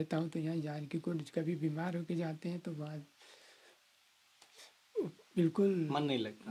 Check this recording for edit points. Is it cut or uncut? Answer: uncut